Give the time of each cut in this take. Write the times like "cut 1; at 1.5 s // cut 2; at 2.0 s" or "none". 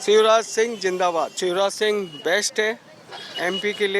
cut 1; at 1.3 s